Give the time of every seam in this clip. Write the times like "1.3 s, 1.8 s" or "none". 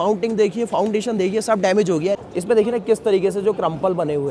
2.2 s